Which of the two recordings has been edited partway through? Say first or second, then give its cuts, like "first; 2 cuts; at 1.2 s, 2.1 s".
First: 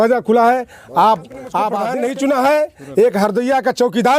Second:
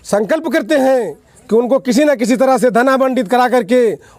first; 1 cut; at 1.9 s